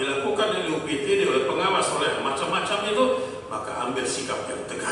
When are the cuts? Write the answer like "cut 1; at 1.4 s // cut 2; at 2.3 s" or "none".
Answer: none

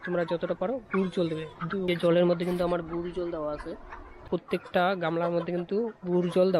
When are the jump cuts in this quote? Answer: cut 1; at 1.9 s // cut 2; at 4.1 s

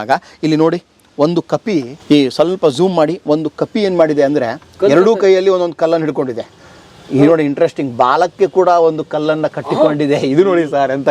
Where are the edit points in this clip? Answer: cut 1; at 1.9 s

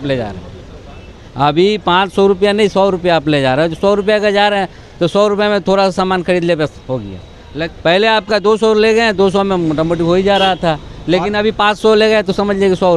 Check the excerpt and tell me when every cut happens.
cut 1; at 7.6 s

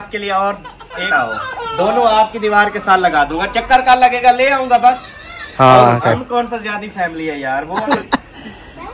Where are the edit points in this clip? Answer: cut 1; at 1.1 s // cut 2; at 6.0 s // cut 3; at 7.8 s

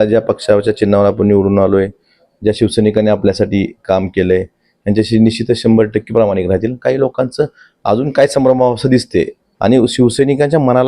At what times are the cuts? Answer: cut 1; at 9.4 s

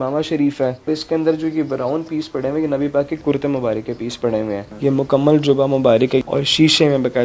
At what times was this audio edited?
cut 1; at 0.9 s // cut 2; at 3.2 s // cut 3; at 4.6 s // cut 4; at 6.2 s

